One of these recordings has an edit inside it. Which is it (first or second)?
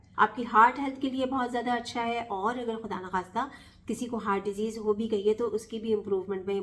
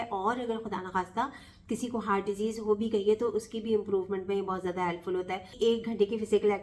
second